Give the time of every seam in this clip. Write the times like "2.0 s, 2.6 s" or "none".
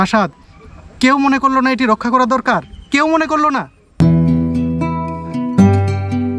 3.8 s

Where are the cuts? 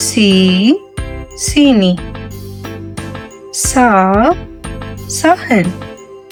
none

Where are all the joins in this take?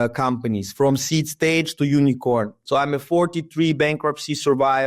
2.6 s

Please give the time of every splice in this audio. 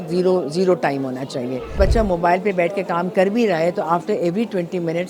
1.8 s

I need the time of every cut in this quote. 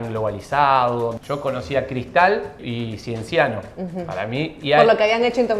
1.2 s, 2.6 s

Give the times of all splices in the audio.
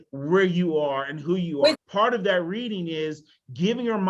1.5 s

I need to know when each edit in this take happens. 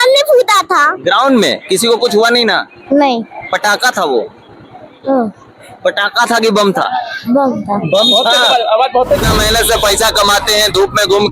9.3 s

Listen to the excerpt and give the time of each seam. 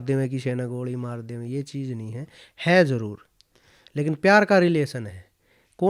none

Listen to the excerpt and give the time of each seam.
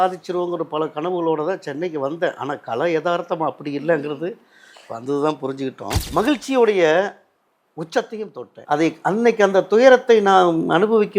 6.0 s, 8.5 s

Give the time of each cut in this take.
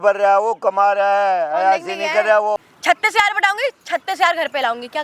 2.6 s

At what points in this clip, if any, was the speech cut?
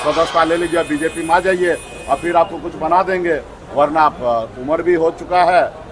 none

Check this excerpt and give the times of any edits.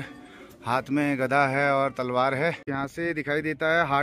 2.7 s

